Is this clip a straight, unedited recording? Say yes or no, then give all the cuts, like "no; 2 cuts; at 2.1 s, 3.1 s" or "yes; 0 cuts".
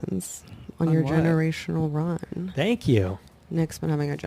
yes; 0 cuts